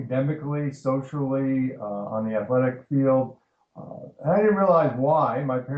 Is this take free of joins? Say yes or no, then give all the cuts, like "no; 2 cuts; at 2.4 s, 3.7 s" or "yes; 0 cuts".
no; 1 cut; at 3.3 s